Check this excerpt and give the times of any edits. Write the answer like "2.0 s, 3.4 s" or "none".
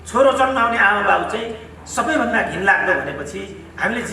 none